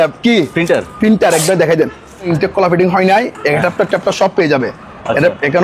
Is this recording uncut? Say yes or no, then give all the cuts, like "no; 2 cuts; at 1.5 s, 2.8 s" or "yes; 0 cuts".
no; 1 cut; at 2.3 s